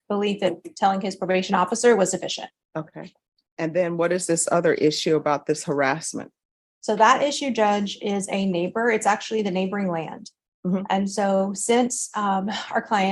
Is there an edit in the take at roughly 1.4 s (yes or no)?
no